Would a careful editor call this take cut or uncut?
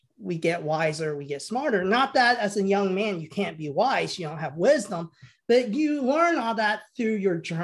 uncut